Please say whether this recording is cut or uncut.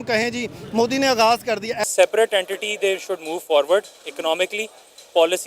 cut